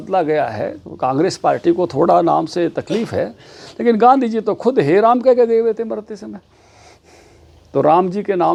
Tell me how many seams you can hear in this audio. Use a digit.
0